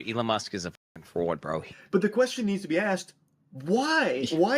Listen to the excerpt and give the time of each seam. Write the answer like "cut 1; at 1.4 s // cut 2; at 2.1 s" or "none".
cut 1; at 1.8 s

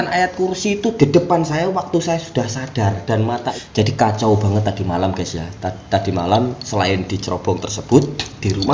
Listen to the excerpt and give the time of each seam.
cut 1; at 3.5 s

